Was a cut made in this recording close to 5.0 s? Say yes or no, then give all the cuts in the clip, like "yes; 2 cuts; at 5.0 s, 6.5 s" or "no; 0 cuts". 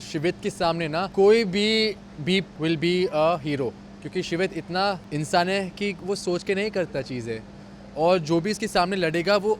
yes; 3 cuts; at 1.1 s, 2.5 s, 5.0 s